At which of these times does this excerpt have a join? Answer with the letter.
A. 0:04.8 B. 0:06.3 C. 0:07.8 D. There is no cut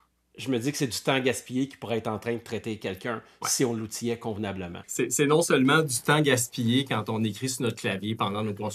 A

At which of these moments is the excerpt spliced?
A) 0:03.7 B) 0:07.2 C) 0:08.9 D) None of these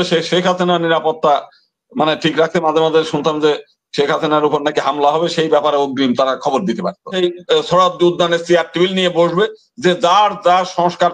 B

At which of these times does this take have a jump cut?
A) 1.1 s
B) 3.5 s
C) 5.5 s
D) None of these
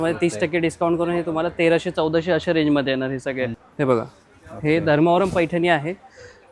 B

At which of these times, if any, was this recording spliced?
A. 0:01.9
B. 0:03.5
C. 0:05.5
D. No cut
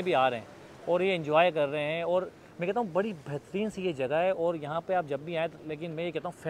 D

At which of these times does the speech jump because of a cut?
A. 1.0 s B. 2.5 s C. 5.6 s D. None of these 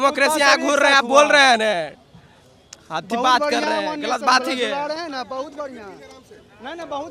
D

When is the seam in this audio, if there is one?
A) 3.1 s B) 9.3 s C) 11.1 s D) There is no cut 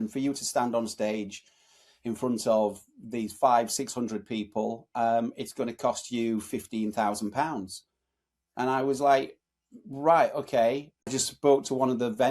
C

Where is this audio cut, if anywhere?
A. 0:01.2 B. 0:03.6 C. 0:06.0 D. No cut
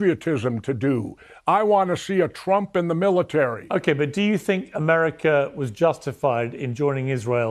B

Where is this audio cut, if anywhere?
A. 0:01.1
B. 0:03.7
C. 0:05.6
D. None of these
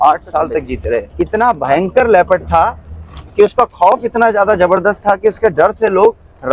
A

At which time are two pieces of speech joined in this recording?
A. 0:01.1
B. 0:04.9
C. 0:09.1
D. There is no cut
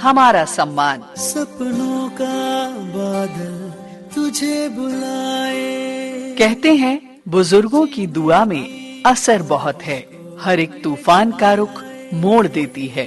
A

